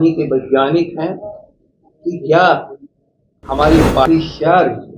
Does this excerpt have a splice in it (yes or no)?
yes